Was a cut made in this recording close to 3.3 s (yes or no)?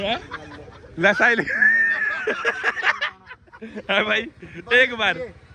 no